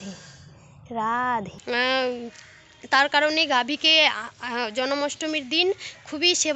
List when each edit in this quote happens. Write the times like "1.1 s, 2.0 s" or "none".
1.6 s